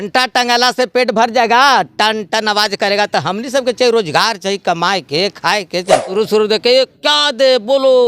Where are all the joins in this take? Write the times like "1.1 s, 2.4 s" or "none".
6.1 s